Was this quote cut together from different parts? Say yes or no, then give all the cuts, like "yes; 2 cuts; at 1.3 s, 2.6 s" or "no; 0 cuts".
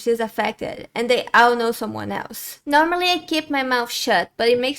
yes; 1 cut; at 2.5 s